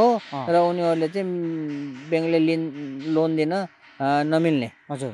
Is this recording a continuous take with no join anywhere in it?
yes; 0 cuts

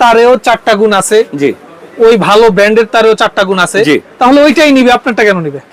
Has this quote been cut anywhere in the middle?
no; 0 cuts

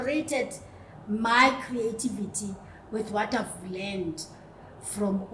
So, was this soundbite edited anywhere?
no; 0 cuts

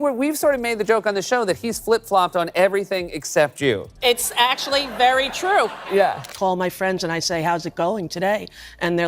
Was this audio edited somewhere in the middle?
yes; 1 cut; at 6.2 s

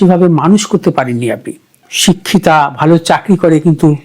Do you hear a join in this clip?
yes; 1 cut; at 1.8 s

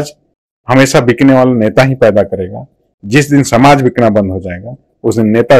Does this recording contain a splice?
no; 0 cuts

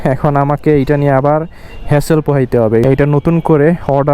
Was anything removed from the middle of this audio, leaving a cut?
yes; 1 cut; at 2.8 s

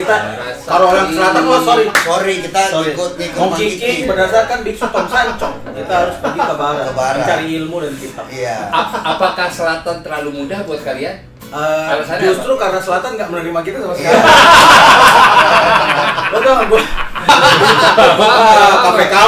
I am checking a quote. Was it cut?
yes; 1 cut; at 17.3 s

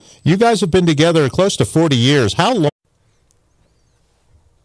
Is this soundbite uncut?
yes; 0 cuts

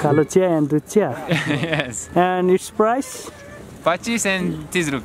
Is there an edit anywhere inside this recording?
no; 0 cuts

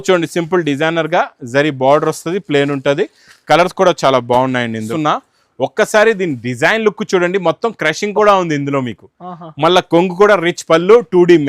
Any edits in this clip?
yes; 1 cut; at 4.9 s

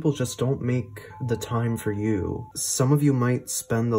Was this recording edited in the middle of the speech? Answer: yes; 1 cut; at 2.6 s

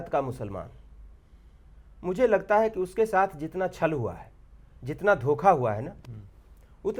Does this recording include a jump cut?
no; 0 cuts

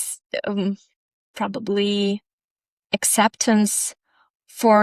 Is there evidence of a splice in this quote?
no; 0 cuts

